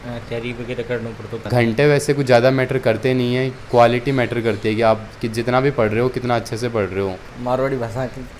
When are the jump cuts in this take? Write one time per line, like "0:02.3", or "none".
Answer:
0:01.5
0:03.6
0:07.3